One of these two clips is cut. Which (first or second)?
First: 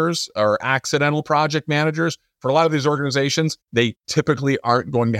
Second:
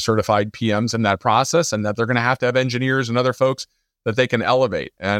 first